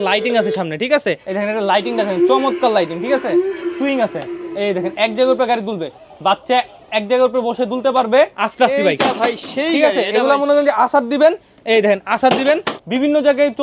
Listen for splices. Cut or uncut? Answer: cut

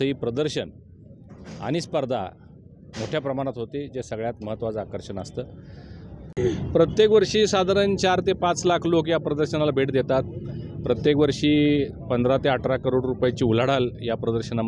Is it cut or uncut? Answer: cut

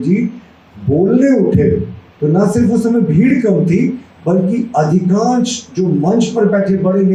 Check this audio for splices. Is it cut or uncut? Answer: uncut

